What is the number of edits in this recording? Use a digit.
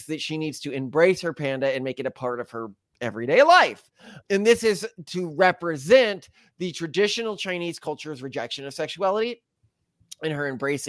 0